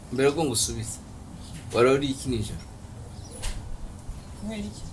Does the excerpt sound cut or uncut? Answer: uncut